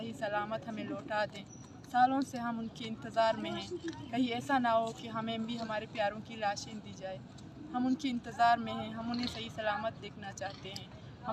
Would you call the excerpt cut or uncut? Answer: uncut